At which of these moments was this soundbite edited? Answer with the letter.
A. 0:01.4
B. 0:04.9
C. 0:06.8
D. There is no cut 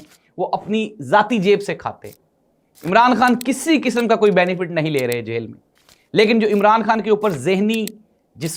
D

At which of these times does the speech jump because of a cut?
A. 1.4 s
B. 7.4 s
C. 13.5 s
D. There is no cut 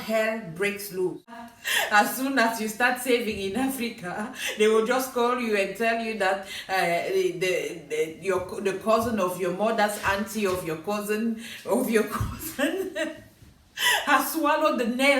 A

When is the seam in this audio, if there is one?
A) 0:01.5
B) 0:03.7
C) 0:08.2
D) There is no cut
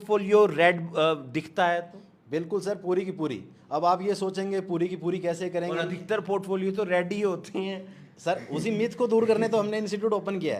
D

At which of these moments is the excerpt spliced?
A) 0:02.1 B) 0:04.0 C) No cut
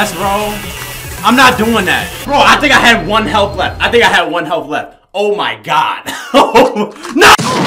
A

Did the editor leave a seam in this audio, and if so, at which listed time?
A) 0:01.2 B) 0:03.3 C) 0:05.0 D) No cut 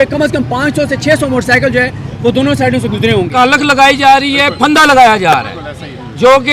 B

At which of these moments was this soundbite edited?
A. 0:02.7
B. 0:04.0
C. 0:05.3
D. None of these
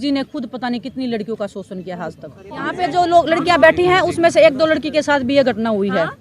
A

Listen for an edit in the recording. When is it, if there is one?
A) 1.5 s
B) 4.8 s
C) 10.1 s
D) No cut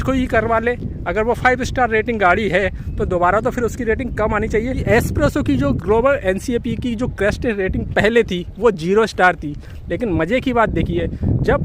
B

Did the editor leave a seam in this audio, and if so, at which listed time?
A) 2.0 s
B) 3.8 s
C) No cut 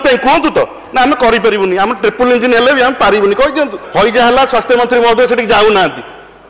B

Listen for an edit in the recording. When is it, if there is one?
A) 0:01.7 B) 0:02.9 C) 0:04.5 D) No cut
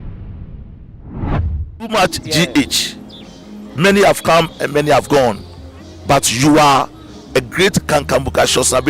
A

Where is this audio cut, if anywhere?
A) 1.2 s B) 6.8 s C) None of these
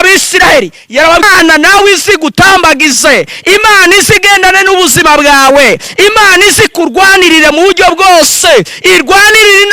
A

